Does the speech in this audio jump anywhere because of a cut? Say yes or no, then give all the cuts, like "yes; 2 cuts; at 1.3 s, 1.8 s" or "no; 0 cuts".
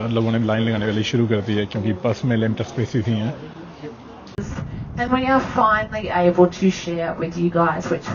yes; 1 cut; at 4.5 s